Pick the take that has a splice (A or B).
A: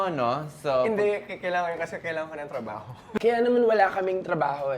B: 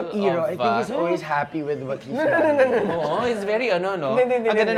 A